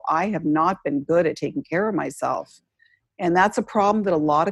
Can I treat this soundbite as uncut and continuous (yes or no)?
yes